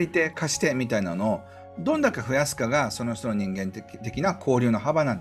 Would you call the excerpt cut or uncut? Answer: uncut